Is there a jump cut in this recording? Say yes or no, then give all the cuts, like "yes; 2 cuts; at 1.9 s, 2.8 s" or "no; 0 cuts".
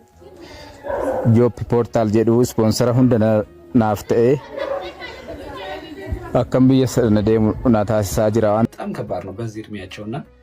yes; 1 cut; at 8.7 s